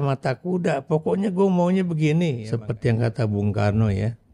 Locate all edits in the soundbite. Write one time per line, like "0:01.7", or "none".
0:02.5

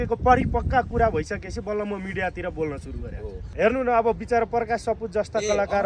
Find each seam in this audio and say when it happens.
0:03.4

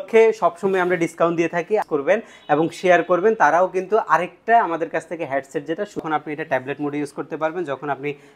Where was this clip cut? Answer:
0:01.8
0:06.0

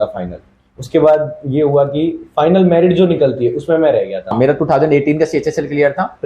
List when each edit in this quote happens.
0:04.4

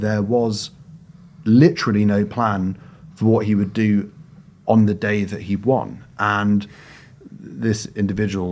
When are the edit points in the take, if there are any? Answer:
none

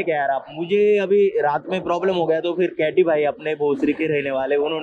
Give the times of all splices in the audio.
none

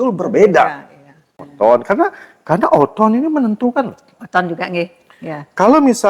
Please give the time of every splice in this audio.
0:01.4

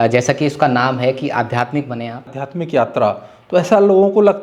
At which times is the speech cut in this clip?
0:02.4

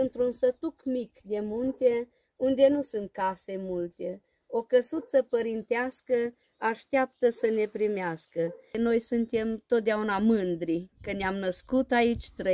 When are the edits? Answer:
0:08.8

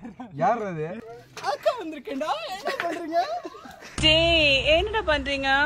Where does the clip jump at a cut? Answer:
0:01.0

